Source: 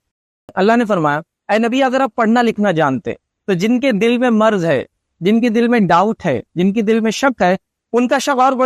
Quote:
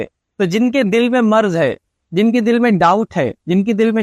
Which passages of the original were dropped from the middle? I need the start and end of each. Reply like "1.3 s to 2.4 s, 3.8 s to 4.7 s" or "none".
none